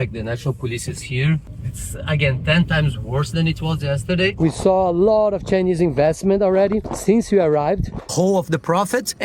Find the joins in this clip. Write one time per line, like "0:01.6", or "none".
0:04.3
0:08.1